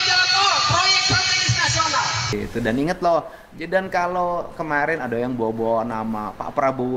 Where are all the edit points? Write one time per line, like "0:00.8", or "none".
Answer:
0:02.3